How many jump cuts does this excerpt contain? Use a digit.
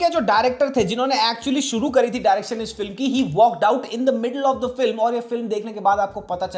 0